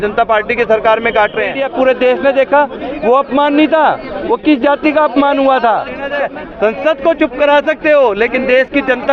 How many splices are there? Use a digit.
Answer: 2